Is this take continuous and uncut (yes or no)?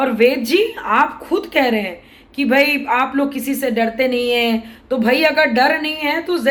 yes